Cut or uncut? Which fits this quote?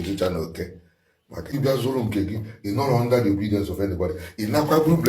cut